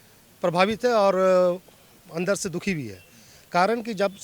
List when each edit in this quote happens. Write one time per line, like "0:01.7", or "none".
none